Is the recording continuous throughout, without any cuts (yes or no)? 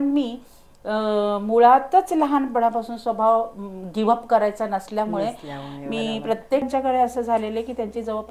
no